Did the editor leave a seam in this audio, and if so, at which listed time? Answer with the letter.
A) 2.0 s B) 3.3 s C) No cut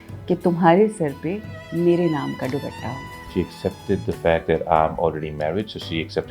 B